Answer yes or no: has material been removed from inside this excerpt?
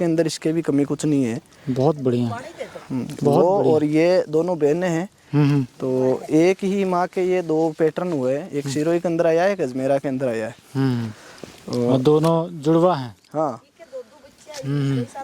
no